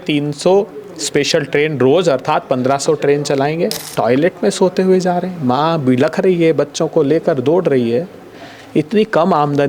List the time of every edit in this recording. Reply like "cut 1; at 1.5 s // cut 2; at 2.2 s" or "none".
cut 1; at 3.8 s